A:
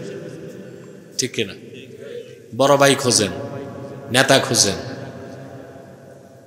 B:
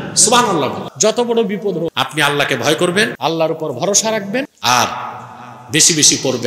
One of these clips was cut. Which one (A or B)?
B